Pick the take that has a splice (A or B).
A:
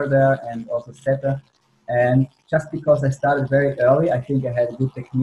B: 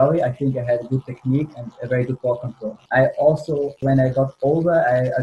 B